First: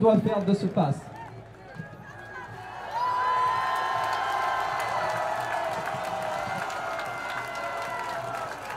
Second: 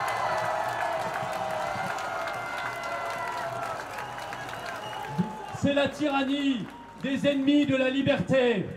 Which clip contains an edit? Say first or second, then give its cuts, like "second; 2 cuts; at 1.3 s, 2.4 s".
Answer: second; 1 cut; at 5.0 s